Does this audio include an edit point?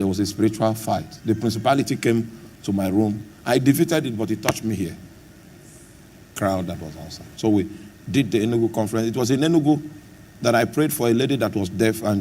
yes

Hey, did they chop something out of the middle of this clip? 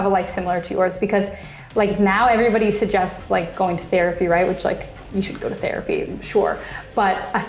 no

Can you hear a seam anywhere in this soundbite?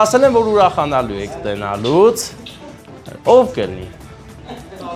no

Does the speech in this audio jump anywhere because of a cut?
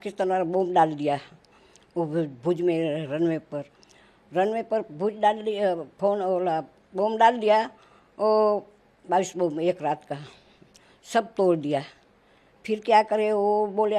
no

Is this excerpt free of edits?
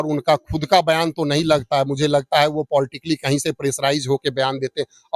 yes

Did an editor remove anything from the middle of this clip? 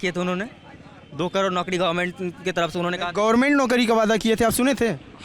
no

